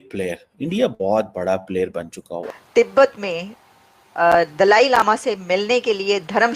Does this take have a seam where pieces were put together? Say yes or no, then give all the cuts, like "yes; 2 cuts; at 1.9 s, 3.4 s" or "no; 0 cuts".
yes; 1 cut; at 2.6 s